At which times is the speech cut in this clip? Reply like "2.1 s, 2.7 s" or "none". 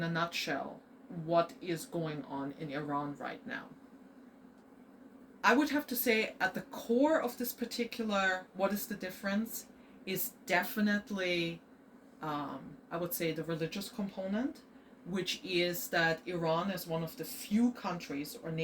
4.6 s